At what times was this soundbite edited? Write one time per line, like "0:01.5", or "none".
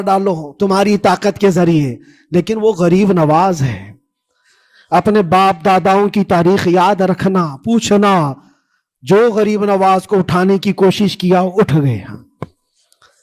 none